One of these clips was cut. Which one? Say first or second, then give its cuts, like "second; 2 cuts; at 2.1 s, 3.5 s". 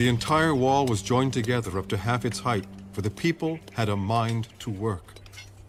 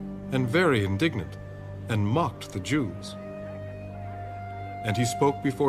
second; 1 cut; at 4.1 s